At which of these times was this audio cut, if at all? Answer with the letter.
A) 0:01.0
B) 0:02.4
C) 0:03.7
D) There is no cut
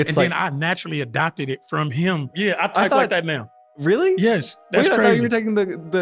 B